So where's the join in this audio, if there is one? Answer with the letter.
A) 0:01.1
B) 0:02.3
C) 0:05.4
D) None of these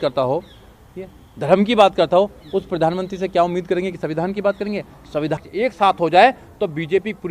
C